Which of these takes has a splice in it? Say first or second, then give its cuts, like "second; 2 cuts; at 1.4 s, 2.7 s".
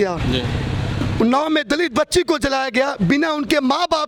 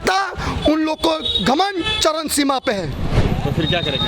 second; 1 cut; at 3.2 s